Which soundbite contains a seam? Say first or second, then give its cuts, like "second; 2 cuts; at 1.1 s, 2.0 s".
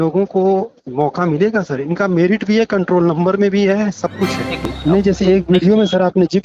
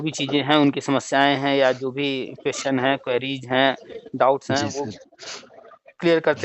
first; 1 cut; at 4.6 s